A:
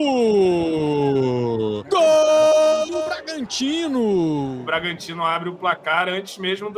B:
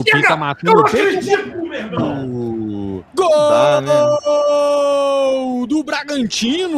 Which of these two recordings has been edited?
A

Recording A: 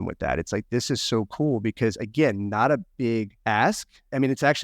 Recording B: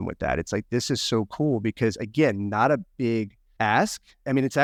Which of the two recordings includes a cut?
A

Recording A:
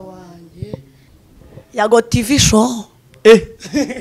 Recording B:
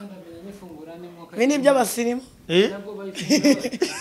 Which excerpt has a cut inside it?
A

